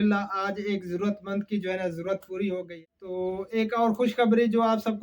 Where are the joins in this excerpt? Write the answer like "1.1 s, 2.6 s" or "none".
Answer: 2.7 s